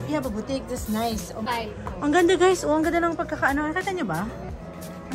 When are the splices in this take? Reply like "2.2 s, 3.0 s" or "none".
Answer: 1.4 s